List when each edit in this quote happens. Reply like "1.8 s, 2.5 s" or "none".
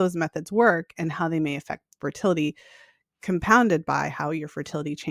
none